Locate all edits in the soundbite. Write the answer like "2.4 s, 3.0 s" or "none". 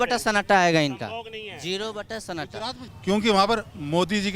2.8 s